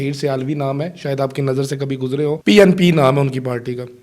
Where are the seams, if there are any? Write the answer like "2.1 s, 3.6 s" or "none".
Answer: 2.4 s